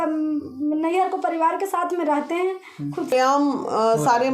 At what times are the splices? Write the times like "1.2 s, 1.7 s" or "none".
3.1 s